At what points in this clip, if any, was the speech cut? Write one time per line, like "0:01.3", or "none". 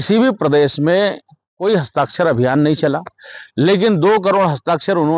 none